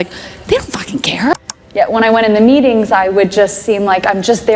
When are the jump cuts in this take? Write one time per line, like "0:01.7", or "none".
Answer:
0:01.6